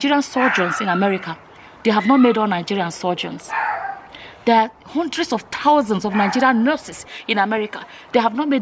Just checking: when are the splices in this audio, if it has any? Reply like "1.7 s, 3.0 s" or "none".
none